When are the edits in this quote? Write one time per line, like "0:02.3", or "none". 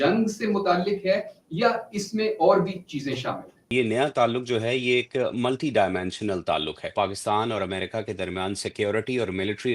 0:03.7
0:06.9